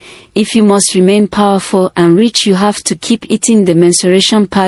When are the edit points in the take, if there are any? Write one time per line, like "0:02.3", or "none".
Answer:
none